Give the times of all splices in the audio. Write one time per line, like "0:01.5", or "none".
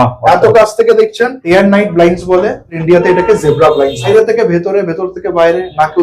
0:01.4
0:02.8
0:04.1